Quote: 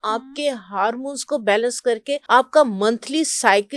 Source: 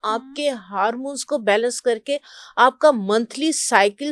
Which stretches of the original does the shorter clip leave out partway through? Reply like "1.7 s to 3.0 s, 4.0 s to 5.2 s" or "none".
2.2 s to 2.5 s